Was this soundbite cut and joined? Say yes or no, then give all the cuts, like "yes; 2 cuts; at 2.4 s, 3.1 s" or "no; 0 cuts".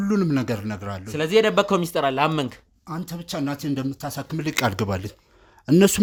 no; 0 cuts